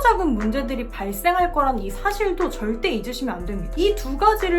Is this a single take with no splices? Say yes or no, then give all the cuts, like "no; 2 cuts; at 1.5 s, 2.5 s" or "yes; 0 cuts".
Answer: yes; 0 cuts